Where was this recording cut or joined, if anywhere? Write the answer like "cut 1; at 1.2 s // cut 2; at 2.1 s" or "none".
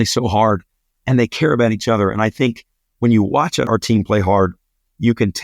cut 1; at 3.7 s